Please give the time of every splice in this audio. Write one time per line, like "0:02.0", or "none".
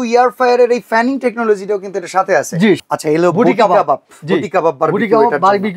0:02.8